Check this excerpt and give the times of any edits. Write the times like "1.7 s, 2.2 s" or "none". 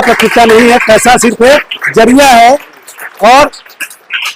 none